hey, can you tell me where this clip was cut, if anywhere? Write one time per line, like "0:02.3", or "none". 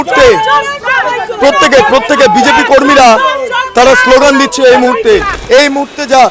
0:05.3